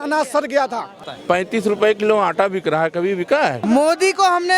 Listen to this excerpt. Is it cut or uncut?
cut